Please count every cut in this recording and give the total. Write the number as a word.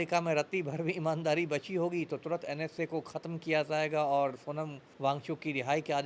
one